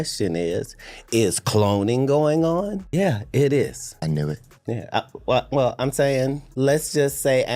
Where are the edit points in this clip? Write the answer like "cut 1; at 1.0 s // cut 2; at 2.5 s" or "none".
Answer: cut 1; at 2.8 s // cut 2; at 3.9 s // cut 3; at 6.4 s